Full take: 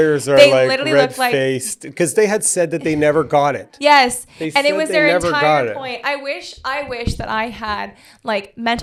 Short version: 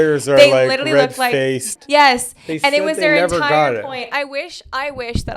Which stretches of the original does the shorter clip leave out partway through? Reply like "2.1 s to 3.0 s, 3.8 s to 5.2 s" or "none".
1.8 s to 3.7 s